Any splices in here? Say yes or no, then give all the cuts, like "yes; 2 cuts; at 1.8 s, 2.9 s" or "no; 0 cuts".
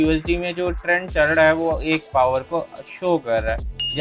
no; 0 cuts